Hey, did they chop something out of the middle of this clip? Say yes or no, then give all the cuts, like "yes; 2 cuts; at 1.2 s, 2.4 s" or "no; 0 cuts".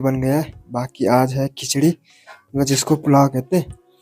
no; 0 cuts